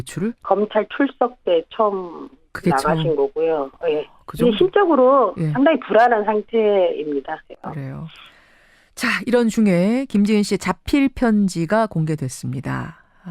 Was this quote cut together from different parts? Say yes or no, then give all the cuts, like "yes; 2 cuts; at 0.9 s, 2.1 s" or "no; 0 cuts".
yes; 1 cut; at 10.0 s